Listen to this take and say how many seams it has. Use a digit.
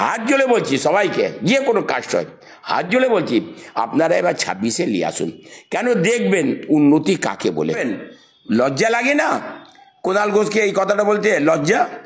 1